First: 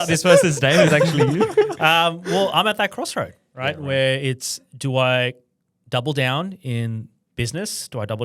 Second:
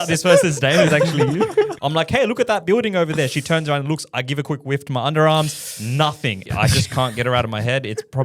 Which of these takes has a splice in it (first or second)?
second